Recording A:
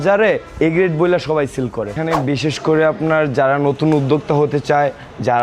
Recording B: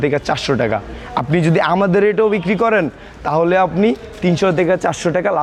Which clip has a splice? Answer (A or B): A